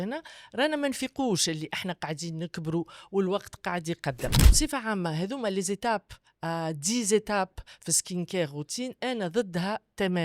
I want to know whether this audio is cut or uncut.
cut